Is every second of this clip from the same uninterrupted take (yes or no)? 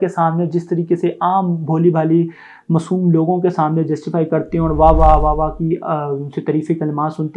yes